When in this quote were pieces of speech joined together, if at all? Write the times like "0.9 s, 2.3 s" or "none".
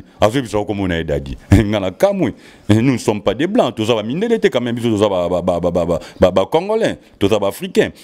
none